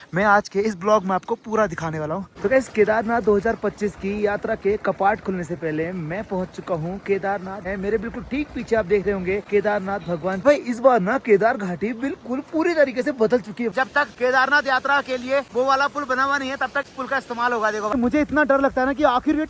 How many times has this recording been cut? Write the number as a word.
seven